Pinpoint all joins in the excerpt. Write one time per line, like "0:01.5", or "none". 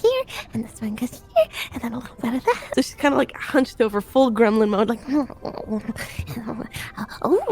0:02.6